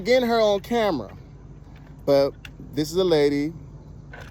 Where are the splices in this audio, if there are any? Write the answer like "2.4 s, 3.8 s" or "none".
none